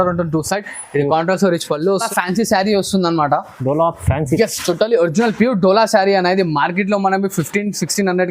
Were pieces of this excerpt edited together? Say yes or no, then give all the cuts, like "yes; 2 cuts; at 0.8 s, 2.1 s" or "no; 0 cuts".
yes; 1 cut; at 2.1 s